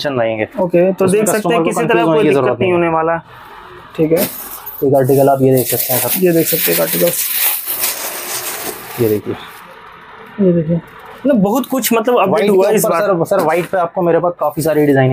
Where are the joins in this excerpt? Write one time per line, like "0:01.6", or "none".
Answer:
none

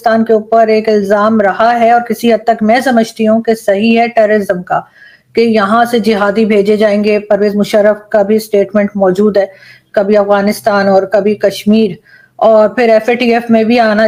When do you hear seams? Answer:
none

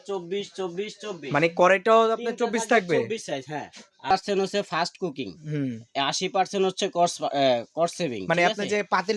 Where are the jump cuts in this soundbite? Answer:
0:04.1

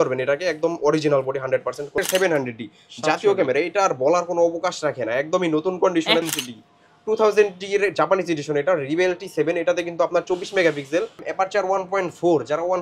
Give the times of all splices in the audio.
0:02.0
0:06.3
0:11.2

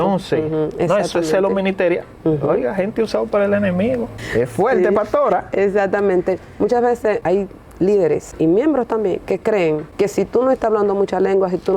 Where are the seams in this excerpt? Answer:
0:04.2
0:07.2
0:08.3
0:09.9

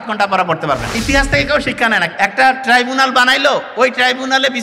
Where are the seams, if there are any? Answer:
0:01.0
0:02.1

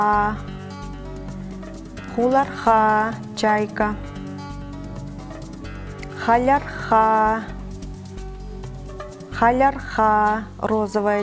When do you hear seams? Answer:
none

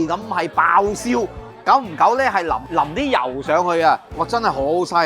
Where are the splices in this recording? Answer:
0:02.6
0:04.2

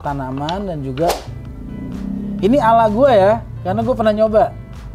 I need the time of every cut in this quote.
0:01.3

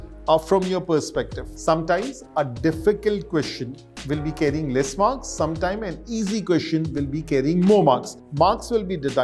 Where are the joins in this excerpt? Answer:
0:01.4
0:08.2

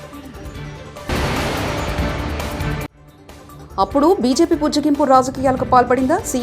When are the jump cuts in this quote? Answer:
0:01.1
0:03.1

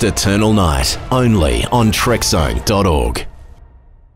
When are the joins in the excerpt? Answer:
0:03.2

